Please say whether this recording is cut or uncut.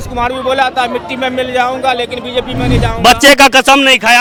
uncut